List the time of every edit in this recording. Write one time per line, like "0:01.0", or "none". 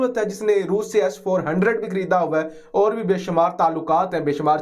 none